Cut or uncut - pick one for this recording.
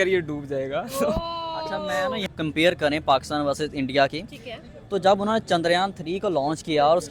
cut